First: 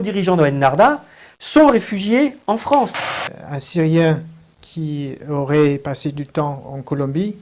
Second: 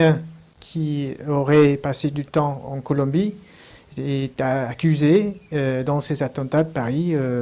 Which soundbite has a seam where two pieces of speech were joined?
first; 1 cut; at 2.9 s

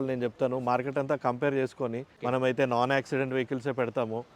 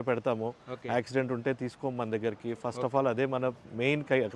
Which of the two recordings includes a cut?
first; 1 cut; at 2.1 s

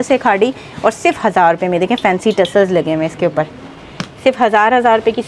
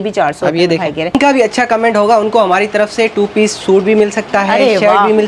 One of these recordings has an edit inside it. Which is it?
second; 1 cut; at 1.1 s

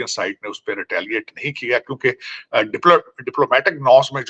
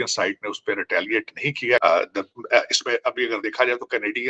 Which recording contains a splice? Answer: second; 1 cut; at 1.8 s

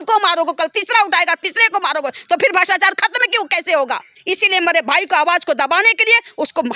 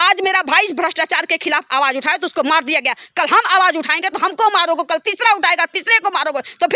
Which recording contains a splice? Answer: first; 1 cut; at 4.1 s

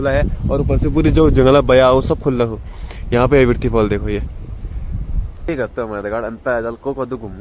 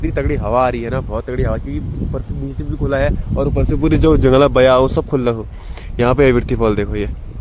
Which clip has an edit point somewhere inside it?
first; 1 cut; at 5.5 s

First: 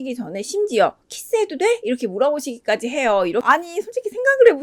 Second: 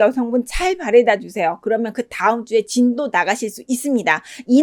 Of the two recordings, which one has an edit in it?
first; 1 cut; at 3.4 s

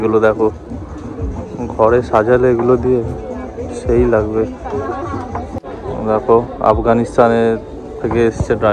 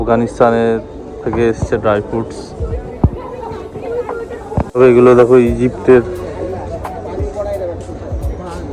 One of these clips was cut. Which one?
first; 1 cut; at 5.6 s

